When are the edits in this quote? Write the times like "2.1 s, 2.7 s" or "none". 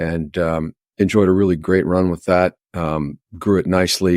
none